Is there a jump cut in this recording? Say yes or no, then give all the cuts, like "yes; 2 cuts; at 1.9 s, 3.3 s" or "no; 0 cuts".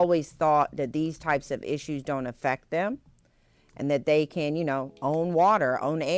no; 0 cuts